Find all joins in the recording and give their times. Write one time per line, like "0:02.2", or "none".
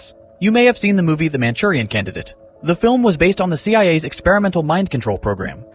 none